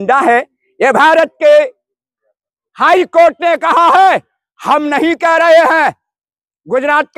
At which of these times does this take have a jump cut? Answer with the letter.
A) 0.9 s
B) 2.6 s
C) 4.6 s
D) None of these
D